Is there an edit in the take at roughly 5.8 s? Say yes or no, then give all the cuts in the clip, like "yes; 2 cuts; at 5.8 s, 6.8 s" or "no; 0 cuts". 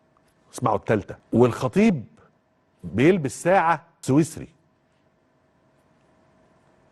no; 2 cuts; at 1.2 s, 3.9 s